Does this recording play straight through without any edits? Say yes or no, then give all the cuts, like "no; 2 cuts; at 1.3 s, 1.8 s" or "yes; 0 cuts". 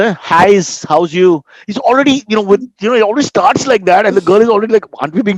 yes; 0 cuts